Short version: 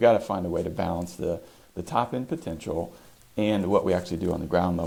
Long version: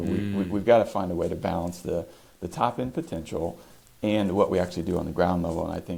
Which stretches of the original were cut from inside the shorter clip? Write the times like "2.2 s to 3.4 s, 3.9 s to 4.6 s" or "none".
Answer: none

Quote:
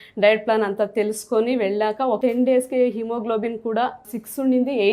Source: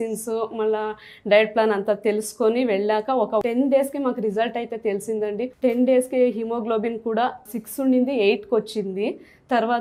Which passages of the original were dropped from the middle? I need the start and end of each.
3.3 s to 5.6 s

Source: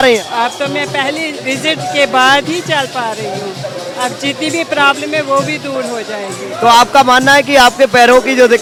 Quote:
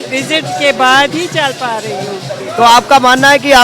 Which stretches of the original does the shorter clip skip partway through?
3.7 s to 6.4 s

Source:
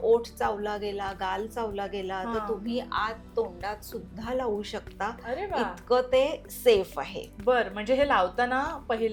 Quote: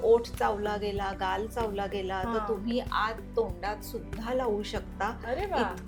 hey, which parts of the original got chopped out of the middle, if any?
none

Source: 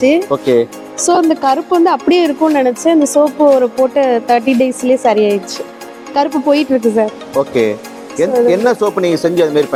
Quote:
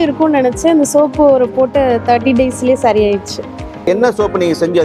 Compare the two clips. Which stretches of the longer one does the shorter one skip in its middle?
6.1 s to 8.5 s

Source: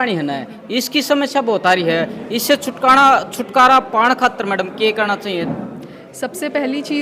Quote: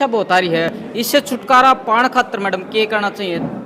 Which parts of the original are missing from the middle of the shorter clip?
2.5 s to 3.2 s

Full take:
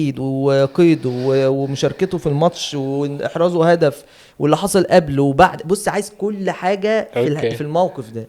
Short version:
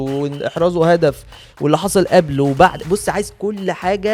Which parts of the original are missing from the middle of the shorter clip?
none

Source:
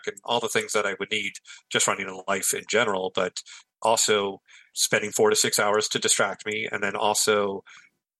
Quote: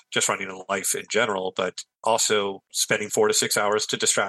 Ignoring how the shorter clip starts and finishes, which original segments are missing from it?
3.4 s to 3.6 s, 4.5 s to 4.7 s

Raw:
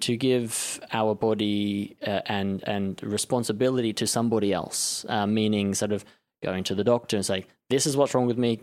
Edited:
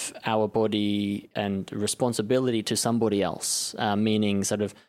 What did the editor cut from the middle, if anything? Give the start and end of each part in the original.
2.0 s to 2.6 s

